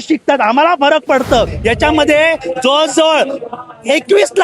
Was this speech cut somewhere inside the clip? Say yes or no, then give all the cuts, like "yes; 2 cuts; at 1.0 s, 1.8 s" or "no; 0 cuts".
yes; 1 cut; at 1.5 s